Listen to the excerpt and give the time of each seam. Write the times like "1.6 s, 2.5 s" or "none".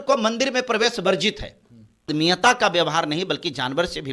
2.1 s